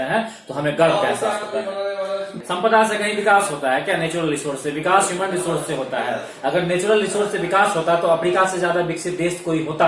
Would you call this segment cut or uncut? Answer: cut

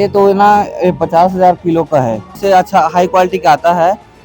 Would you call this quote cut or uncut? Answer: cut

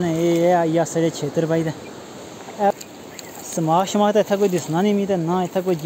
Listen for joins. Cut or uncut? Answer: cut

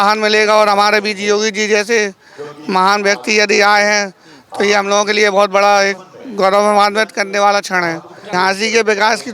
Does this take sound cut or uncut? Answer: cut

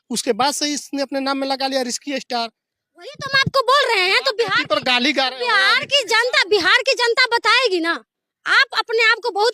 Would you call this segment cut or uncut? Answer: uncut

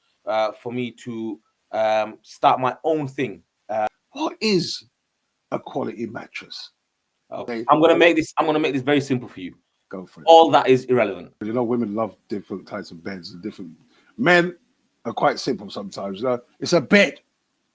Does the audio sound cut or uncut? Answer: cut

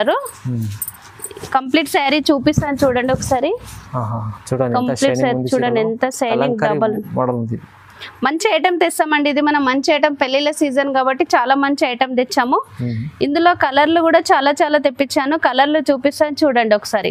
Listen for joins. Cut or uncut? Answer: uncut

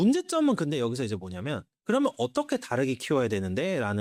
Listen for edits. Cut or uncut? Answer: uncut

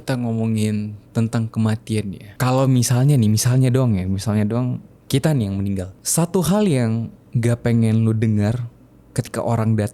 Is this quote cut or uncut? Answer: cut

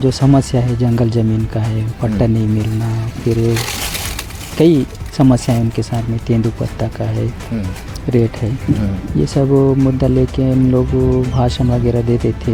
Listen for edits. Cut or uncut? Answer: uncut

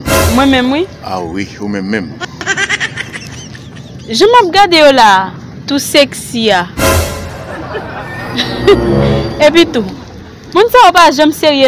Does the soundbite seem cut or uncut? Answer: uncut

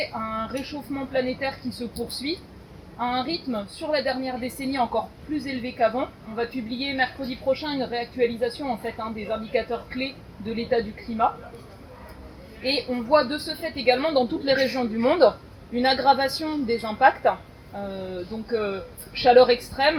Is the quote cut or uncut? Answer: uncut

